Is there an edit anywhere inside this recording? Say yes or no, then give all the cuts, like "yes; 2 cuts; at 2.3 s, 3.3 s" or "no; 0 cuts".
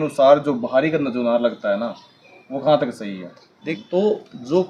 no; 0 cuts